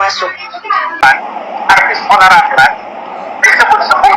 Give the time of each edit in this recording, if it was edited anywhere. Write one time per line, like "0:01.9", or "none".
0:01.0

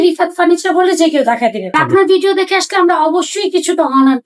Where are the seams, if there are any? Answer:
0:01.8

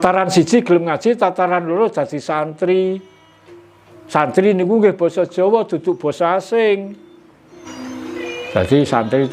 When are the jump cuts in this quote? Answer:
0:07.6

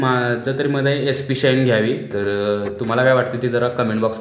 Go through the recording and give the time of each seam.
none

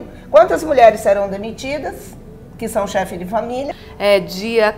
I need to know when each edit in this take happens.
0:03.8

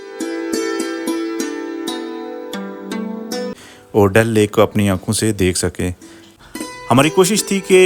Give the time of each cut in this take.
0:03.6
0:06.3

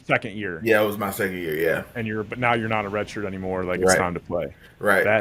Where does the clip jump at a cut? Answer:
none

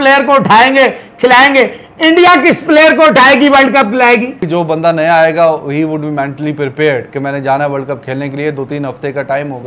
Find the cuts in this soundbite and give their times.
0:04.4

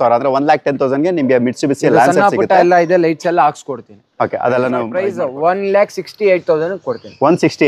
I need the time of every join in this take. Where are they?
0:04.9

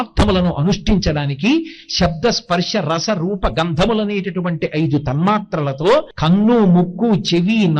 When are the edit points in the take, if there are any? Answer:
0:06.1

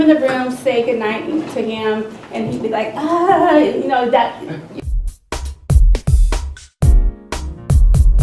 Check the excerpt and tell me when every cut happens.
0:04.7

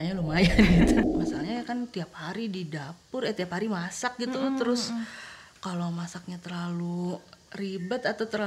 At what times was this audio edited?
0:01.2

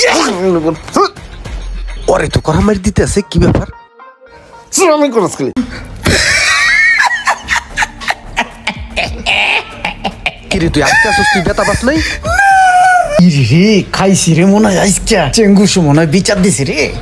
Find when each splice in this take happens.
0:05.6
0:13.2

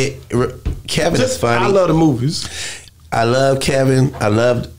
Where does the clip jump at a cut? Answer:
none

